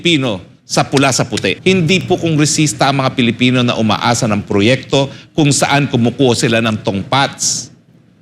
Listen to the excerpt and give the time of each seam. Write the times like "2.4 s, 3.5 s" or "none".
1.6 s